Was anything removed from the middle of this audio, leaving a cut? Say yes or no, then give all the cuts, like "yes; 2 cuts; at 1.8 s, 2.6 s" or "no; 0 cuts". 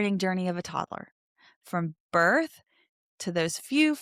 no; 0 cuts